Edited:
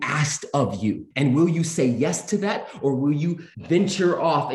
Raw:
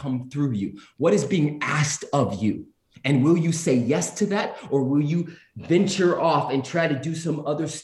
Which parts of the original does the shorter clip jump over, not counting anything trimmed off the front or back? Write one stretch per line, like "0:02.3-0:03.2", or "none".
0:02.7-0:03.0
0:05.4-0:05.5